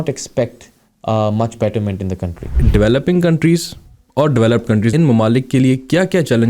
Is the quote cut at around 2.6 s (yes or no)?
yes